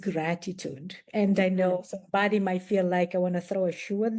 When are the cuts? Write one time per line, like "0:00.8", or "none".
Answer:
none